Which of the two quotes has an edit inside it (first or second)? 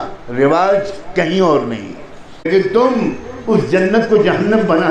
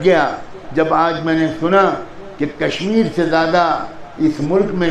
first